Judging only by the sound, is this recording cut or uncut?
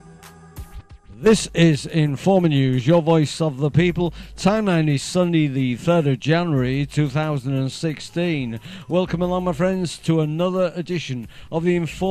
cut